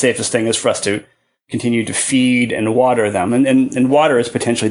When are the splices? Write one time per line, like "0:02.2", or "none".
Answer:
none